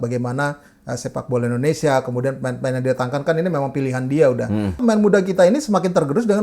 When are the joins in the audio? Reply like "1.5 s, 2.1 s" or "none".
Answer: 4.8 s